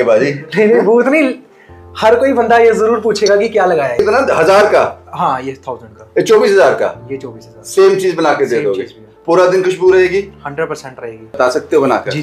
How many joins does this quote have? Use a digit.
2